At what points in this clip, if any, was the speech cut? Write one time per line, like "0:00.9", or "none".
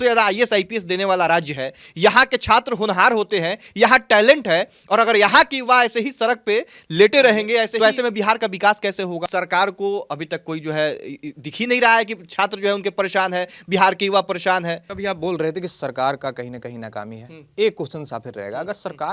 0:07.7
0:09.2
0:14.9